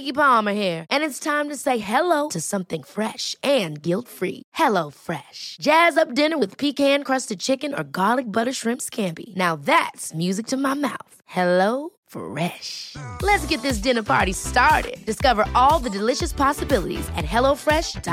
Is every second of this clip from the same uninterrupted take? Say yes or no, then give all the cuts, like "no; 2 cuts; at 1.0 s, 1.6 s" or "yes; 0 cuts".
yes; 0 cuts